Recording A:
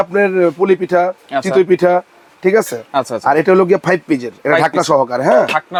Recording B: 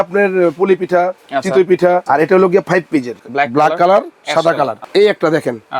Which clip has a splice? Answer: B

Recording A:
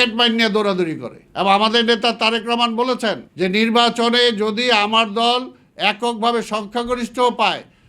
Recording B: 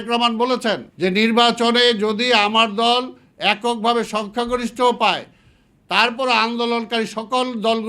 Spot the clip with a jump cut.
A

